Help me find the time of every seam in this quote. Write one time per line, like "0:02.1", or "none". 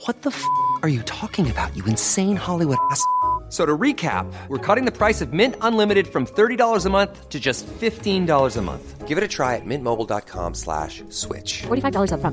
none